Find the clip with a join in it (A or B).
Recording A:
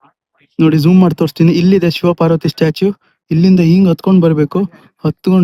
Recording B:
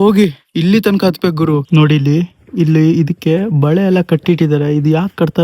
B